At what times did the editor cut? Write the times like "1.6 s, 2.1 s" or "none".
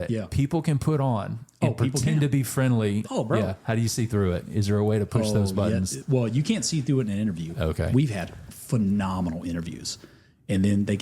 3.2 s